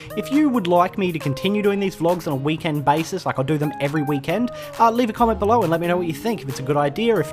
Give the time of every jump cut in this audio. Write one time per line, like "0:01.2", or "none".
0:01.3